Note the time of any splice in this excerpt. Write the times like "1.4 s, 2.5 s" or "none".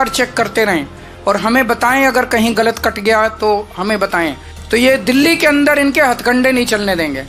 4.5 s